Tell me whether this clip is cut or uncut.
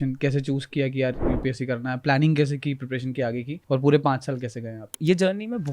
cut